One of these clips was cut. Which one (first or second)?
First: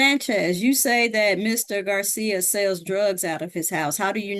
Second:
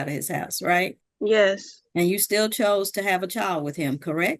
second